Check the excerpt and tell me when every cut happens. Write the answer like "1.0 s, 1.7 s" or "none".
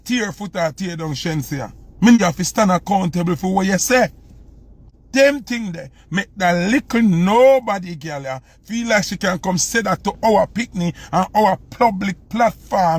2.2 s, 4.9 s